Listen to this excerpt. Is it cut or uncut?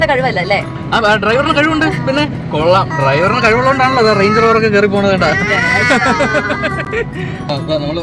uncut